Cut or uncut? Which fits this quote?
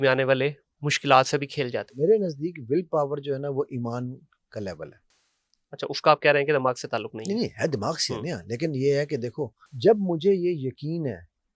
cut